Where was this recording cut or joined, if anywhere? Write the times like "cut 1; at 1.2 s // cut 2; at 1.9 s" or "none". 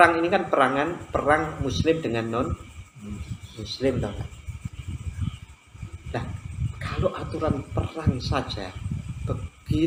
none